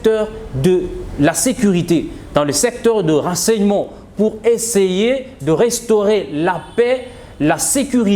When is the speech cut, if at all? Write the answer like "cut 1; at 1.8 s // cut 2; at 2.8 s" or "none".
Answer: none